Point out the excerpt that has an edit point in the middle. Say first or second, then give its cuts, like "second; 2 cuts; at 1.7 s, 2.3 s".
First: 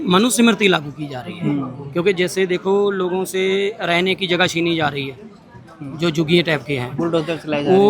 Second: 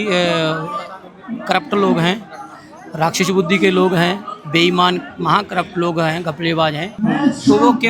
second; 1 cut; at 6.9 s